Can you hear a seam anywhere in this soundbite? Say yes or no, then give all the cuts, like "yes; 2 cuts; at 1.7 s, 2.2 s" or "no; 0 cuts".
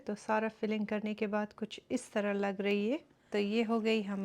yes; 1 cut; at 3.2 s